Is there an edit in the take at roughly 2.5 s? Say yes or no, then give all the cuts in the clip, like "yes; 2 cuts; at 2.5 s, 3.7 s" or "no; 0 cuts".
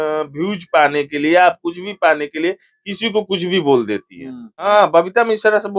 no; 1 cut; at 4.7 s